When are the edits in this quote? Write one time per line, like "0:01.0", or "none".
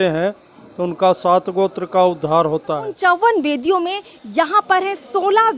0:02.9

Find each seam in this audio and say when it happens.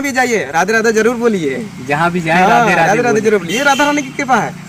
none

